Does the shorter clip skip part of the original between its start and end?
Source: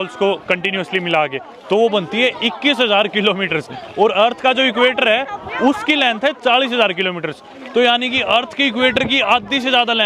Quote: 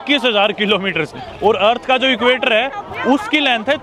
no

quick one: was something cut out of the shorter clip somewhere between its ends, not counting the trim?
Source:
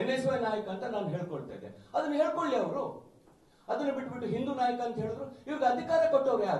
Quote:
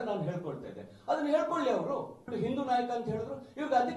yes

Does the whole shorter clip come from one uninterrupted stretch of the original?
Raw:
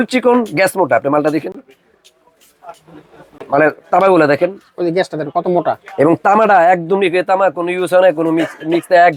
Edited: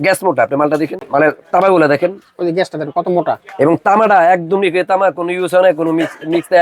no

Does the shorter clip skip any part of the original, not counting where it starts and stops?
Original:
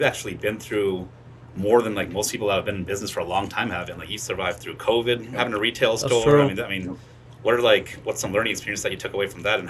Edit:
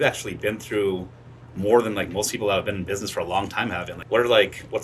yes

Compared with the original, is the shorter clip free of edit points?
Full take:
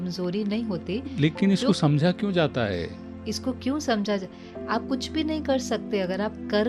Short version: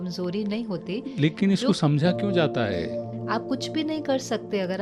no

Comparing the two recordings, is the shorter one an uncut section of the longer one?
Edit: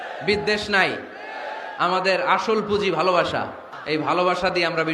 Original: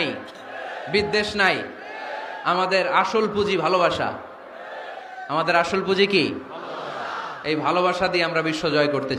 no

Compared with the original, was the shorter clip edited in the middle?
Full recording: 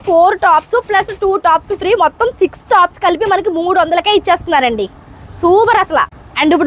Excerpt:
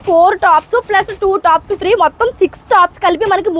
no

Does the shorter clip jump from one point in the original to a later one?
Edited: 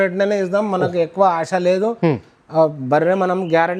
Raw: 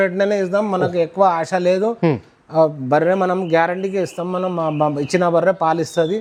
no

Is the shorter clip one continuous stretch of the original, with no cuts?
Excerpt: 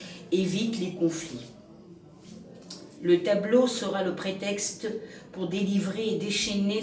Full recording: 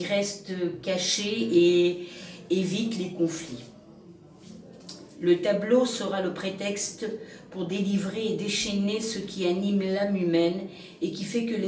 yes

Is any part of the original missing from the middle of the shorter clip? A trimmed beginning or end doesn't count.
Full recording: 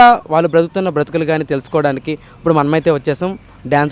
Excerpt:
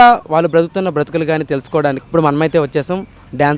yes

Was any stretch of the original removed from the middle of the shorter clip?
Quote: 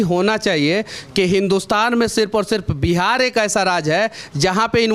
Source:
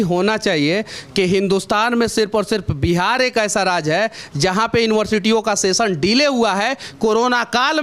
no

